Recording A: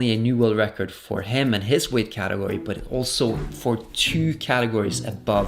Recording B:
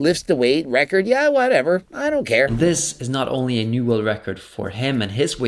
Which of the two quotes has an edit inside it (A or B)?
B